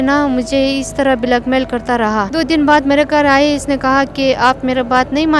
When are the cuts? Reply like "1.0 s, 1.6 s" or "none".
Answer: 2.3 s